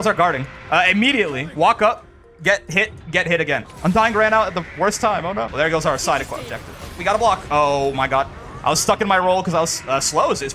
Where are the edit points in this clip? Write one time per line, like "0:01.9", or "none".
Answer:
0:03.7
0:05.5
0:06.9